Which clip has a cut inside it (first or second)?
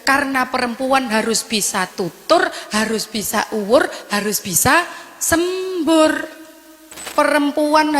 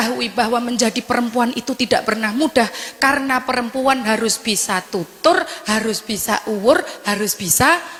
first